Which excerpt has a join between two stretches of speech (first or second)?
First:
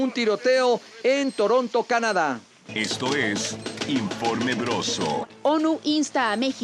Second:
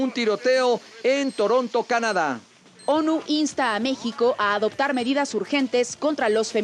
first